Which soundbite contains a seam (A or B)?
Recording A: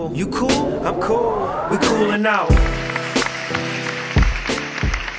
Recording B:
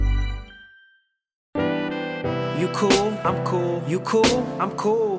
B